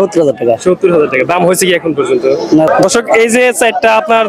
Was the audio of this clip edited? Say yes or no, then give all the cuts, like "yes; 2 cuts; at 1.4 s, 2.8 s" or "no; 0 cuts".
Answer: yes; 1 cut; at 2.7 s